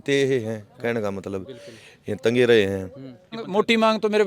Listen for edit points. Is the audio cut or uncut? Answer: cut